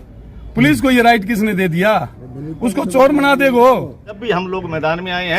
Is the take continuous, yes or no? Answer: no